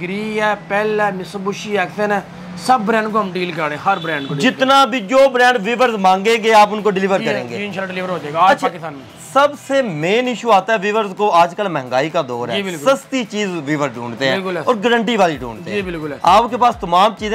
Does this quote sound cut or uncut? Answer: uncut